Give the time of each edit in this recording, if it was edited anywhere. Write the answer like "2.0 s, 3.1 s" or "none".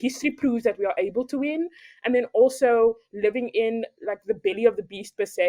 none